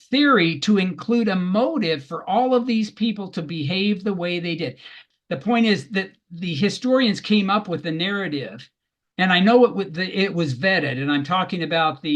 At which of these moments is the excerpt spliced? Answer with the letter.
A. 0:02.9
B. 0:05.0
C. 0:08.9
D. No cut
B